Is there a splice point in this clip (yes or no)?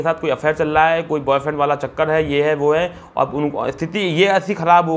no